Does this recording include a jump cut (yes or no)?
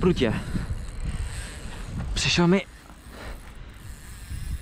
no